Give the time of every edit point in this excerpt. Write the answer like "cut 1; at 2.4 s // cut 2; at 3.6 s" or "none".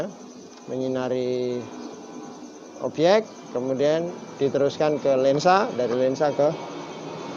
none